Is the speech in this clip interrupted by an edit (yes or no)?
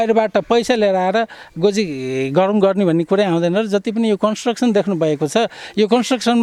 no